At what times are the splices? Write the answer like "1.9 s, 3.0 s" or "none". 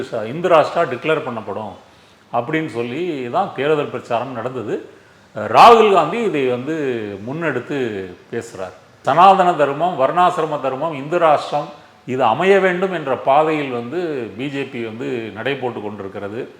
8.9 s